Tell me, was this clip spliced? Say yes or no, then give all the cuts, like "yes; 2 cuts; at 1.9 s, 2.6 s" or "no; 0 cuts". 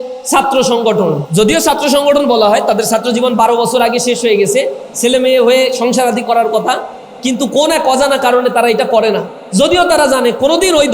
yes; 1 cut; at 1.2 s